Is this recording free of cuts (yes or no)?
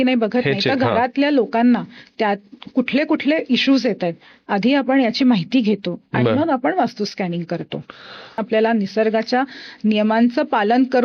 no